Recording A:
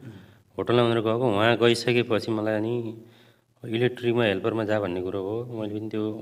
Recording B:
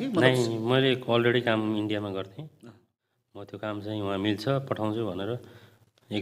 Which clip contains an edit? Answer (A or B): B